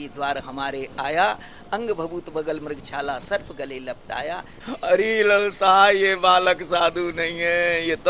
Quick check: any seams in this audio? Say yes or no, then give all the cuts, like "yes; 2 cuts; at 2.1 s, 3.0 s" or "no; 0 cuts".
yes; 1 cut; at 4.6 s